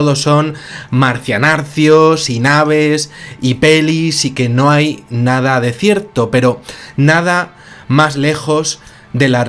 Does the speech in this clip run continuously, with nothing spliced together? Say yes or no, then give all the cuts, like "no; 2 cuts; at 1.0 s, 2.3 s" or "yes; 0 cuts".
no; 1 cut; at 6.1 s